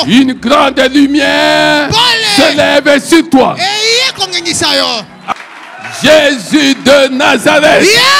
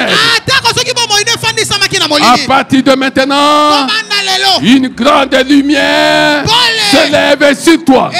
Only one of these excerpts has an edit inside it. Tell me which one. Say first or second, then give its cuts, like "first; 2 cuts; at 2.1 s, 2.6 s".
first; 1 cut; at 5.3 s